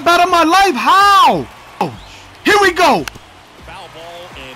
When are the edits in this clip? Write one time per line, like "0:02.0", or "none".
0:02.0